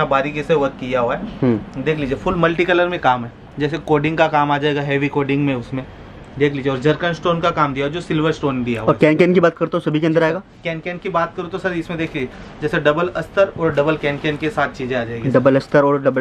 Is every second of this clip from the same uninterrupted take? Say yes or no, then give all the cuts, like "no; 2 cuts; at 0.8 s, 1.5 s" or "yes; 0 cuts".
yes; 0 cuts